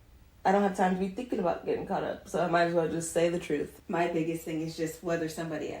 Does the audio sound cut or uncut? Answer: cut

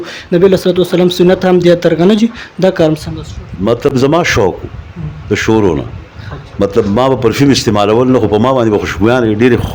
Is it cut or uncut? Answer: uncut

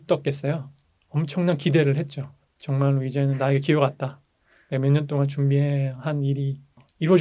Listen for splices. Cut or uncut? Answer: uncut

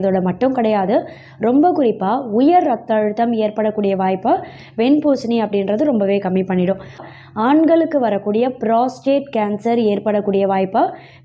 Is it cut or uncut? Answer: cut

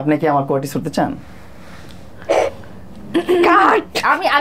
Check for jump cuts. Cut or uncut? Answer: uncut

